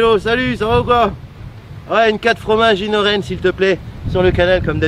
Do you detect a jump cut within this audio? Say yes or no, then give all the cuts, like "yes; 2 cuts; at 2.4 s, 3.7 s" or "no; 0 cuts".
no; 0 cuts